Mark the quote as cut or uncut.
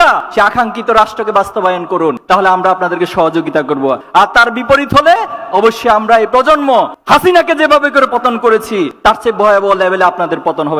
uncut